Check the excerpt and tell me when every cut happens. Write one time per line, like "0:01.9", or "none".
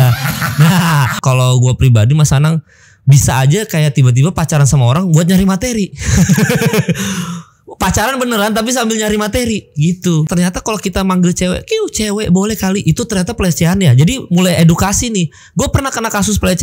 0:01.2
0:10.3